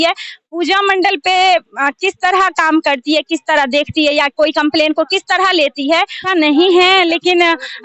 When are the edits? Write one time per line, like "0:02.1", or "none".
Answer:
0:06.2